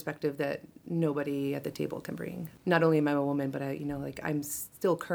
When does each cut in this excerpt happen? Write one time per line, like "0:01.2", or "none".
0:02.5